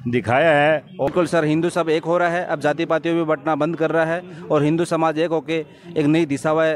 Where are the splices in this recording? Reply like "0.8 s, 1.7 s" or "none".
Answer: 1.1 s